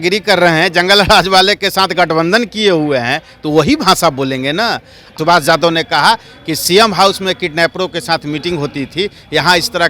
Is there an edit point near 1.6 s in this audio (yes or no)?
no